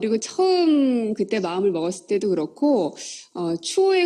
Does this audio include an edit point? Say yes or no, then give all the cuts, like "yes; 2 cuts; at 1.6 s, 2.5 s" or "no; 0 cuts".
no; 0 cuts